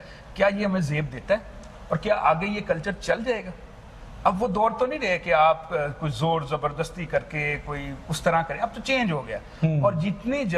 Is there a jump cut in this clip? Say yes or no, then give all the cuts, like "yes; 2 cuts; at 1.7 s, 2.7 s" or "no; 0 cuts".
no; 0 cuts